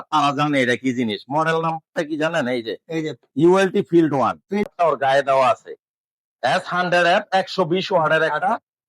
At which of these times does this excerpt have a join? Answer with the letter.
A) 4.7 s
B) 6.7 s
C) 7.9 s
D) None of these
A